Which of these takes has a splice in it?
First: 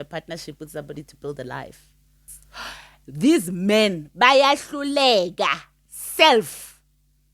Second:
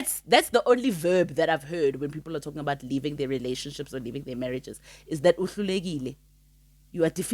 first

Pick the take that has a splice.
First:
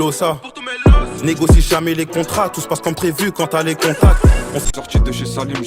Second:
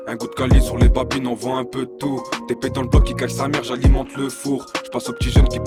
first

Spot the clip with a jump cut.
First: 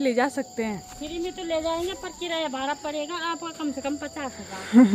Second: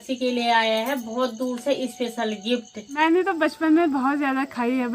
second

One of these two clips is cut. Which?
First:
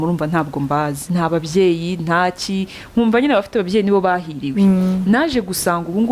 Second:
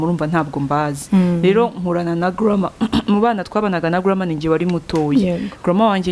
first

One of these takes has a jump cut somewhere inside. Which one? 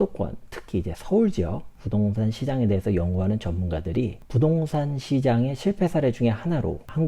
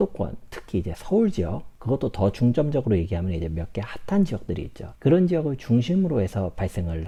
first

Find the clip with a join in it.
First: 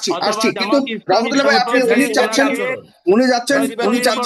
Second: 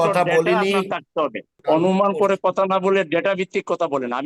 second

